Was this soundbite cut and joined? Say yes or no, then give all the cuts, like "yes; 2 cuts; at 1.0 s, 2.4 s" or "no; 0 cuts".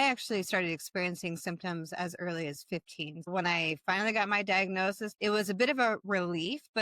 yes; 2 cuts; at 3.3 s, 5.1 s